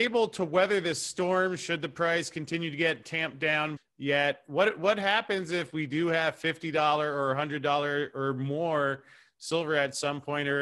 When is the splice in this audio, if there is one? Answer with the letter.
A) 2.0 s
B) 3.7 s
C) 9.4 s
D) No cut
B